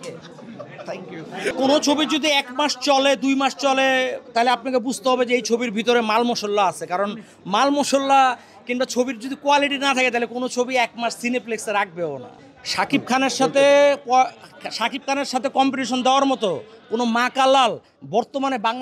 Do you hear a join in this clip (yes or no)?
no